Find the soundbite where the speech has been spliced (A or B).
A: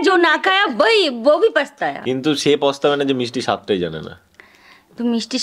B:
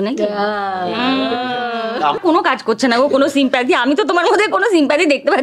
B